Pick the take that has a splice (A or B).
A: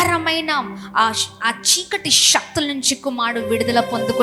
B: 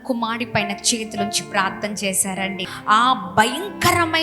B